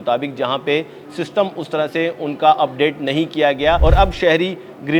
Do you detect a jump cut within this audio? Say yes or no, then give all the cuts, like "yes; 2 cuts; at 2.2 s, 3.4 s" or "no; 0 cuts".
yes; 1 cut; at 3.8 s